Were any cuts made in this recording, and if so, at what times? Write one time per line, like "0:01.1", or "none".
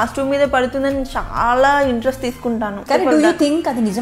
0:02.8